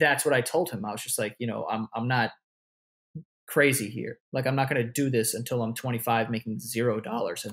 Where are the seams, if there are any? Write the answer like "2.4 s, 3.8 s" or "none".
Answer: none